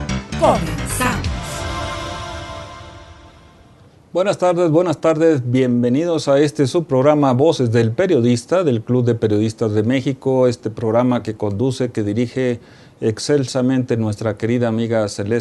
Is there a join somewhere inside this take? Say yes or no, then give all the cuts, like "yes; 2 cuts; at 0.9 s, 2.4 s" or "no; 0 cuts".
no; 0 cuts